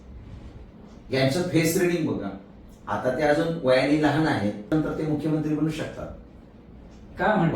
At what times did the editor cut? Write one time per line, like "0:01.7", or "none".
0:04.7